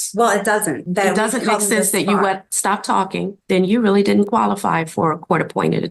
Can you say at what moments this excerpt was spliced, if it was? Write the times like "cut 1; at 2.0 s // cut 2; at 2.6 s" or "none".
cut 1; at 0.8 s // cut 2; at 3.4 s